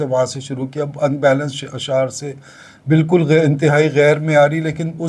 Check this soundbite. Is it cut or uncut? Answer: uncut